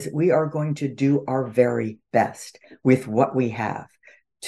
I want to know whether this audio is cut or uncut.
uncut